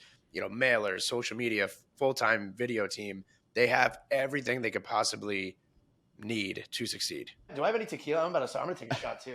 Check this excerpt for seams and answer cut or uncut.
cut